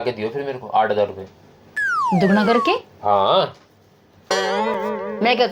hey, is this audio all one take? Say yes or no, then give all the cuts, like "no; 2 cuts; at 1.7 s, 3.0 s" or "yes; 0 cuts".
yes; 0 cuts